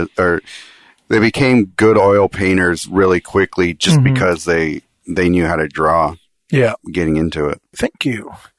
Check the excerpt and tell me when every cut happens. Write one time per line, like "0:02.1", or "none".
0:07.7